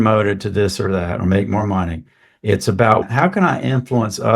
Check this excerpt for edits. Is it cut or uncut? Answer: cut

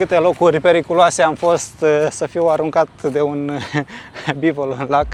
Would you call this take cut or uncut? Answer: uncut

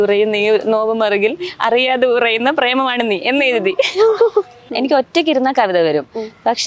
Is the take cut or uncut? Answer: cut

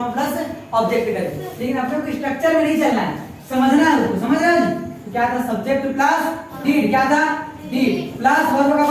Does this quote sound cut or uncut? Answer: cut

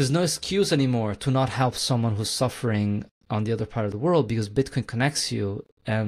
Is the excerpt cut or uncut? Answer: uncut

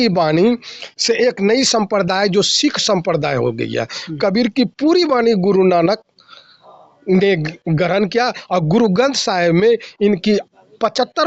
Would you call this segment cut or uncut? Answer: uncut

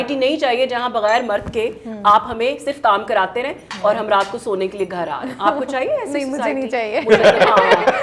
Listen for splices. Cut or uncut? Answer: uncut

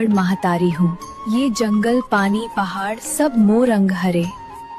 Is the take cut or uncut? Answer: uncut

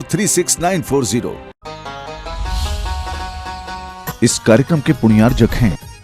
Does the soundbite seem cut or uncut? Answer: cut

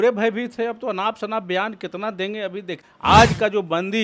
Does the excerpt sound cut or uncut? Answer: cut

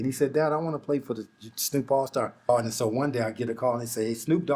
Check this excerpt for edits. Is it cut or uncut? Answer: cut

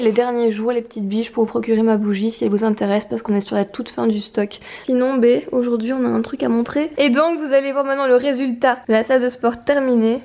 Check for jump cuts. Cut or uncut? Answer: cut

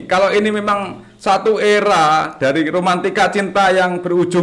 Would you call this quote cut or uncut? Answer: uncut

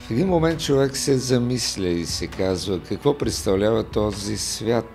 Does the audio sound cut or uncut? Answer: uncut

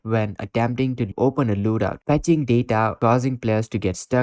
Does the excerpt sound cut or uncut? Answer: cut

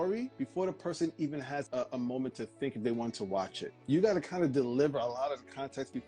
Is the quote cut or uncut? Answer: uncut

